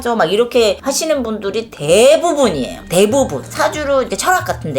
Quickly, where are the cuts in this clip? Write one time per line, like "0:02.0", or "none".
0:03.4